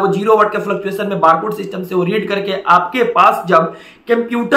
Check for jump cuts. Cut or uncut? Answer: uncut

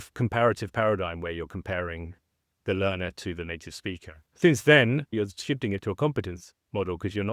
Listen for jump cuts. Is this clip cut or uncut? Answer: cut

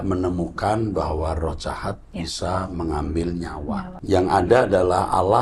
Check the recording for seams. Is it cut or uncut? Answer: cut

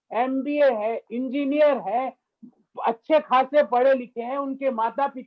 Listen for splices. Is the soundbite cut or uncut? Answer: uncut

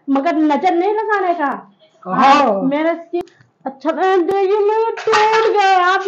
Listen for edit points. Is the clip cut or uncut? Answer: cut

